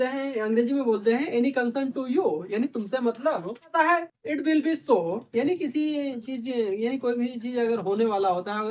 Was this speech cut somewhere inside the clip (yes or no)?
yes